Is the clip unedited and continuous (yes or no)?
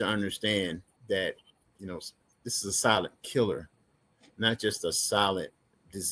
yes